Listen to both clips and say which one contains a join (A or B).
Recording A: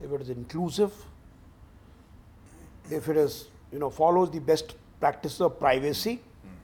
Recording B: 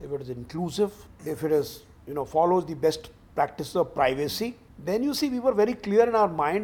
B